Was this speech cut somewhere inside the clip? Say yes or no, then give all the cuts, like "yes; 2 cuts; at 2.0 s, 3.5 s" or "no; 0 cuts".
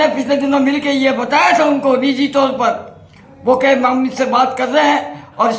no; 0 cuts